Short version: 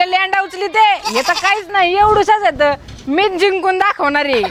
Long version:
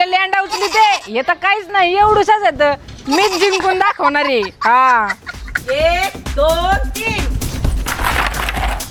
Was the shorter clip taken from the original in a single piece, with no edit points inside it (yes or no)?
yes